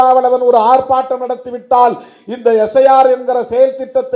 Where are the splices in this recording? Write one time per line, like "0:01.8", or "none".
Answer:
none